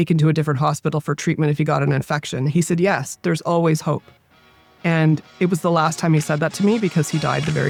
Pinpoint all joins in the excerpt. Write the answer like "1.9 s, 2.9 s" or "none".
none